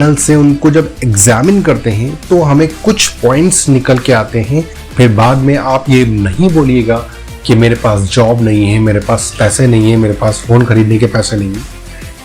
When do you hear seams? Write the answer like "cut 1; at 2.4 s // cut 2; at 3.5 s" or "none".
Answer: cut 1; at 4.8 s